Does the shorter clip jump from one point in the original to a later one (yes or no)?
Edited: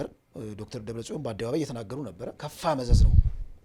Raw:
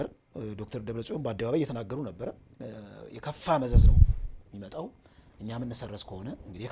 yes